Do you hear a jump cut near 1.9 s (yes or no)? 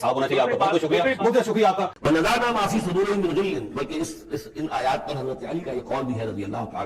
yes